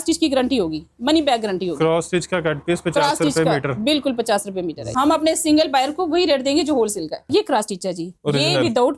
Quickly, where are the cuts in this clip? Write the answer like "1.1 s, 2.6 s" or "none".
4.9 s, 7.3 s